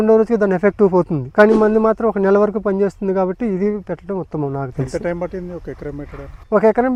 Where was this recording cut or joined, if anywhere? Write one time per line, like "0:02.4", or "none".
none